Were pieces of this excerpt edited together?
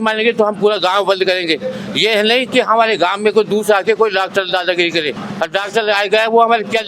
no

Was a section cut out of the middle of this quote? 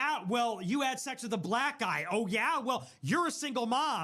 no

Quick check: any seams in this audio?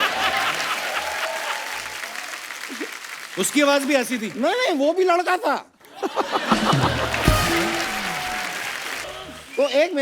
yes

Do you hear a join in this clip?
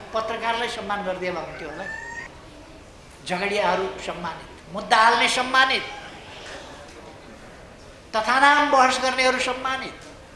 yes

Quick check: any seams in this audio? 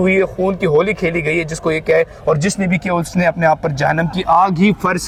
no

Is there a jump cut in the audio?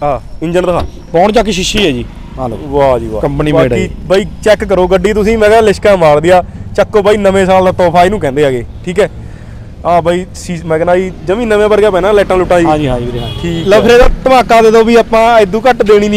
yes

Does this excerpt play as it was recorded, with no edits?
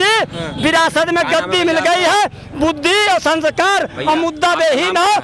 yes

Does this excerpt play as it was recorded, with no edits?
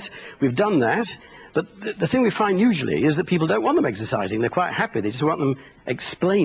yes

